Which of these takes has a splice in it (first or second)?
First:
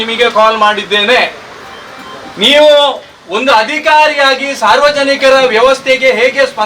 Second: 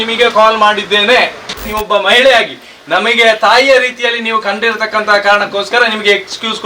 second